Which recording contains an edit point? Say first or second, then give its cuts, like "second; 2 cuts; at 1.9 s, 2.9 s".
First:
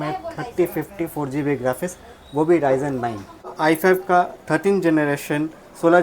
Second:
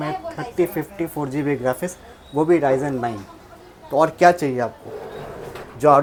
first; 1 cut; at 3.5 s